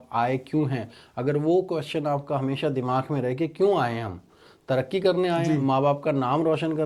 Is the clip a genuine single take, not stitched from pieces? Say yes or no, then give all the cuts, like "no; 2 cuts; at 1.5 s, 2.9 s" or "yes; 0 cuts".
yes; 0 cuts